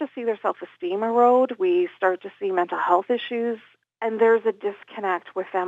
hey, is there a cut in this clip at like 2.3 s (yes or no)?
no